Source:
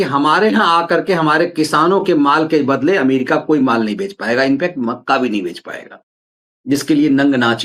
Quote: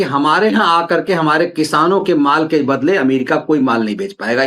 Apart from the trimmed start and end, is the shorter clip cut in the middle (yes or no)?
no